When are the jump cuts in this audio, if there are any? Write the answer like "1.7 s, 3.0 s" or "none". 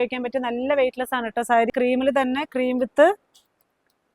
1.7 s

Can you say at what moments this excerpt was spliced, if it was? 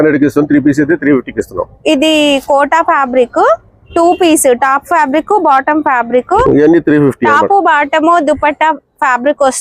6.4 s

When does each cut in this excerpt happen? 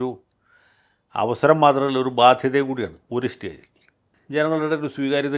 4.2 s

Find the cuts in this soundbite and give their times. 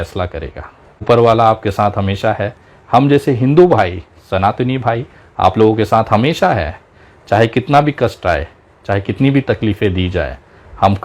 1.0 s

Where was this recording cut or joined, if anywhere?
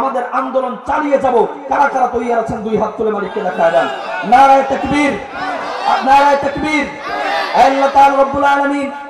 none

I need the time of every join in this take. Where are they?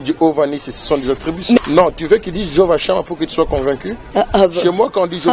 1.6 s

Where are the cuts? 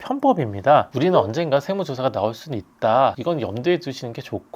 0.9 s

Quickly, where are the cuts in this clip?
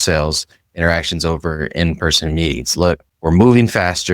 3.1 s

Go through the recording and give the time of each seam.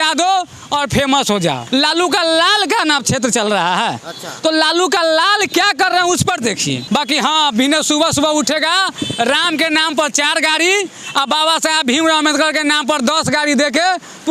1.6 s, 6.8 s

